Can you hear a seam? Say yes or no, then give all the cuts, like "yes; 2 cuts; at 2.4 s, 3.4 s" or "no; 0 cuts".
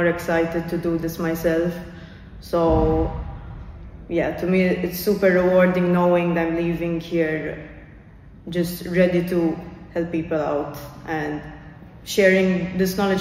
no; 0 cuts